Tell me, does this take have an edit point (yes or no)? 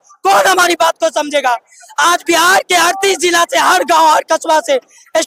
no